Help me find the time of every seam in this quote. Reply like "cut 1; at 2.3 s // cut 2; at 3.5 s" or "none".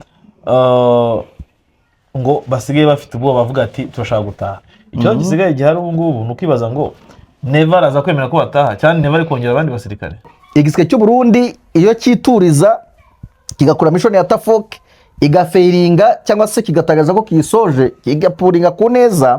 cut 1; at 10.3 s